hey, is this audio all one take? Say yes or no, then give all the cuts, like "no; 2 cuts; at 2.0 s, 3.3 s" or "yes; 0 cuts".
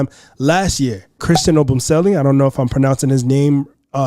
no; 1 cut; at 1.2 s